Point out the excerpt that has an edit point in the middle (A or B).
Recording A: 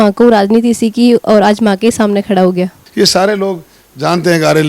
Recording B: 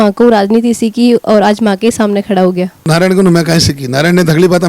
A